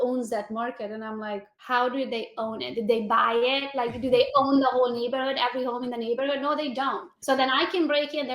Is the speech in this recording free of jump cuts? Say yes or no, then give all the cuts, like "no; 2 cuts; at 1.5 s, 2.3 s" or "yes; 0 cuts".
no; 2 cuts; at 1.5 s, 7.1 s